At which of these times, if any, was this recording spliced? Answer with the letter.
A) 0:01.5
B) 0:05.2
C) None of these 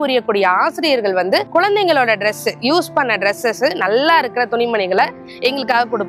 A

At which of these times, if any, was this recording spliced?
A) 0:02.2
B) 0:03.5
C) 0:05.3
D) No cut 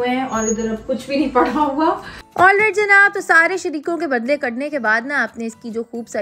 A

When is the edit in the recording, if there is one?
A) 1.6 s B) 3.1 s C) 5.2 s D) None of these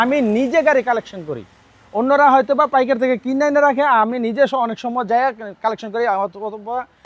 D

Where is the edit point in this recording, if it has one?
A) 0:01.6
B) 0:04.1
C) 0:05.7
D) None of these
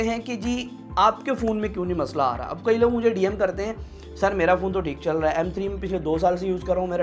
D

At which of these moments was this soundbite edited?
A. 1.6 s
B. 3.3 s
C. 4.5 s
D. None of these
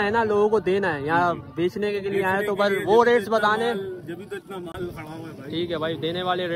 D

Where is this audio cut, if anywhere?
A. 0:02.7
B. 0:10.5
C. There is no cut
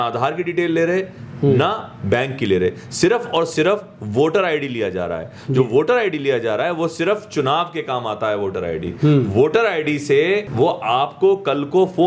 B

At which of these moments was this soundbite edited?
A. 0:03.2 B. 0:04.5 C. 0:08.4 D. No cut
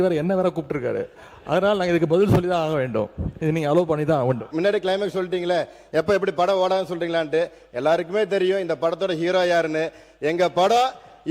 B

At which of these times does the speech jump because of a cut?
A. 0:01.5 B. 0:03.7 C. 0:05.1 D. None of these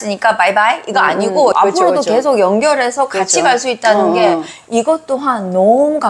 A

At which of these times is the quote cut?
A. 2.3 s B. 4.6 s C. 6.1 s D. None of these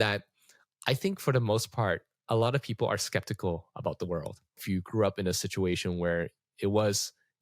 B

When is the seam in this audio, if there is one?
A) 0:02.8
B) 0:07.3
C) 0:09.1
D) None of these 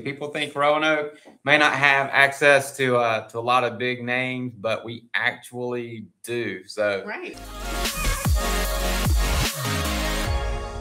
B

